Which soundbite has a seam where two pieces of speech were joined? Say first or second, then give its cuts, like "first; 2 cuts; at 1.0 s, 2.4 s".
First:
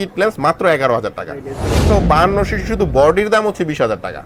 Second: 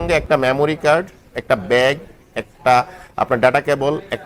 first; 1 cut; at 1.8 s